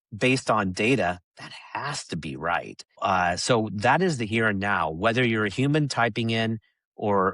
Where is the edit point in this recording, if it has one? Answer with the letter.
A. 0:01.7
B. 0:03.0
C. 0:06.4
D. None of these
B